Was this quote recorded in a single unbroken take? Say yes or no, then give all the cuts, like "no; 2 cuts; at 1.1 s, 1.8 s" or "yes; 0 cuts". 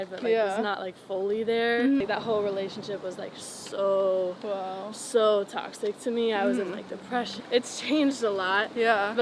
no; 2 cuts; at 2.0 s, 7.4 s